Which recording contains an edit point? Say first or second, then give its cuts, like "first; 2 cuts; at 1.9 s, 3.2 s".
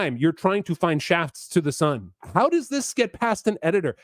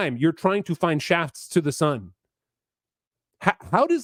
first; 1 cut; at 2.2 s